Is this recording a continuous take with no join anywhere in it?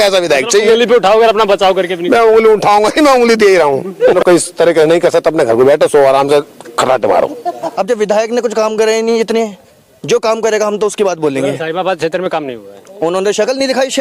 no; 2 cuts; at 4.2 s, 7.7 s

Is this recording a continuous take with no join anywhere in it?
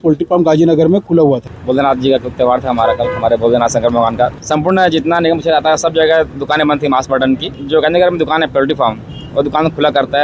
no; 3 cuts; at 1.5 s, 4.4 s, 7.5 s

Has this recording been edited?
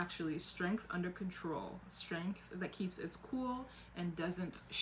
no; 0 cuts

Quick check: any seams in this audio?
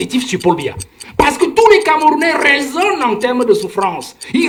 no; 0 cuts

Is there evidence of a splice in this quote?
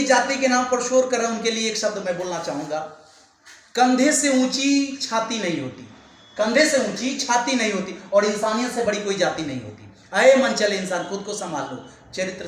no; 0 cuts

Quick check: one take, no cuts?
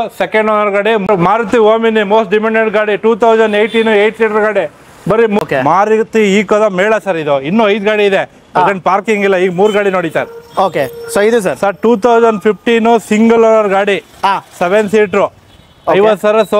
no; 2 cuts; at 1.1 s, 5.4 s

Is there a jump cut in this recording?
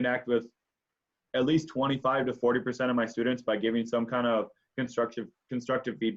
no; 0 cuts

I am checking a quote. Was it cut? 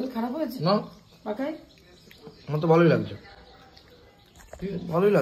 no; 0 cuts

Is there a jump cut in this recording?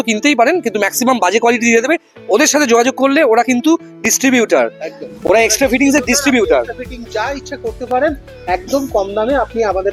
no; 0 cuts

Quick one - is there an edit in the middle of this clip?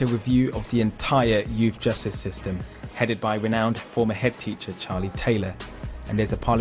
yes; 1 cut; at 2.4 s

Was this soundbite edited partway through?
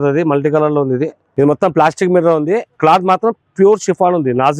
yes; 1 cut; at 1.2 s

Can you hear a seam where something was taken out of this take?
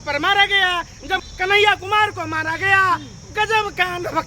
yes; 1 cut; at 1.2 s

